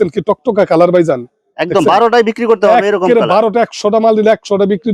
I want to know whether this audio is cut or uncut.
uncut